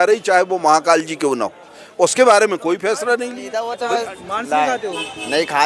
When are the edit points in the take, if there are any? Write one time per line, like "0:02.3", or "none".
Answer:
0:03.8